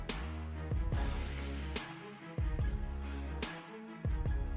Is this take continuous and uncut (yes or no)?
no